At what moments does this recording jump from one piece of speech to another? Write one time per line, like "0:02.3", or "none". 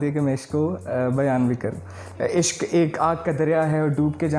0:02.0